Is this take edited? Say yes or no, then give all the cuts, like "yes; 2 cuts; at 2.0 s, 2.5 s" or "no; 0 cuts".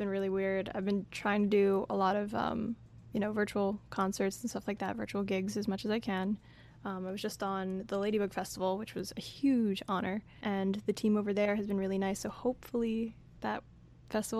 no; 0 cuts